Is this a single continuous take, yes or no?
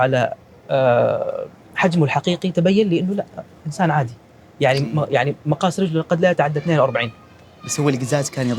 yes